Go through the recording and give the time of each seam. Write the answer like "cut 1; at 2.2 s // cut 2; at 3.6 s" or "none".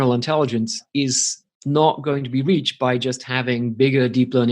none